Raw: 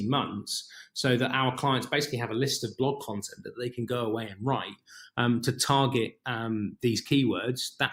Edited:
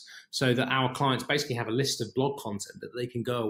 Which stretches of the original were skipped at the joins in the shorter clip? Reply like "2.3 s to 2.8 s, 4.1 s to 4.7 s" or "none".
none